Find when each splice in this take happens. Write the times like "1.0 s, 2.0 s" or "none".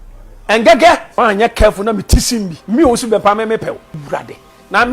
1.1 s, 2.6 s, 3.9 s